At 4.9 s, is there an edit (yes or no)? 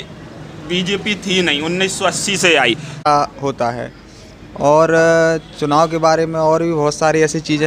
no